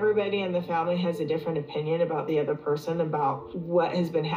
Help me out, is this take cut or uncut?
uncut